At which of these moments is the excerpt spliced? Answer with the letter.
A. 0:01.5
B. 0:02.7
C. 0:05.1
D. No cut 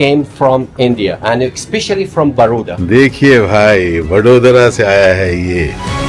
B